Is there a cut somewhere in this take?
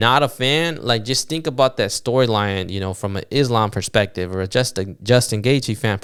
no; 0 cuts

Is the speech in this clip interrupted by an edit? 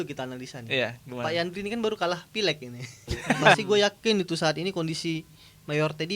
yes; 1 cut; at 3.6 s

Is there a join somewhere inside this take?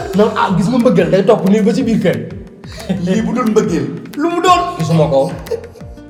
no; 0 cuts

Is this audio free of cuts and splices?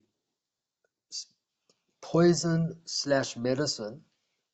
yes; 0 cuts

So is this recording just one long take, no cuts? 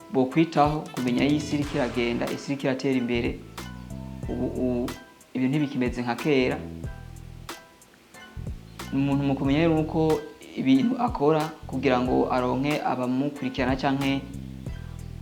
yes; 0 cuts

